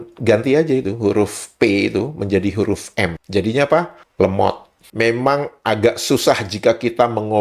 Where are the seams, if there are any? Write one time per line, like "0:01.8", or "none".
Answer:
0:04.8